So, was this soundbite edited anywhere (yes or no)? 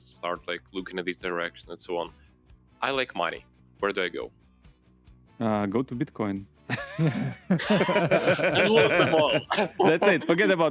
no